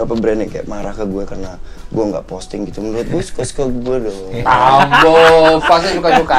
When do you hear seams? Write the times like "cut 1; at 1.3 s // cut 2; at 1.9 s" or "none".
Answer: none